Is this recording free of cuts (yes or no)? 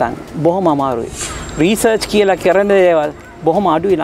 no